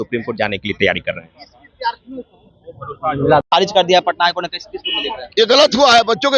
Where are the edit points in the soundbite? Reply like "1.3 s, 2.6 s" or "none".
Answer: 3.5 s